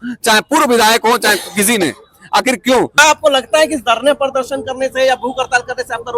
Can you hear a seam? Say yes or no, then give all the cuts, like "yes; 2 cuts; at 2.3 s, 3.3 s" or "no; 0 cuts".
yes; 1 cut; at 3.0 s